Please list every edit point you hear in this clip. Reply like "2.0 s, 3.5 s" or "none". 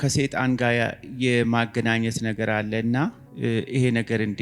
3.3 s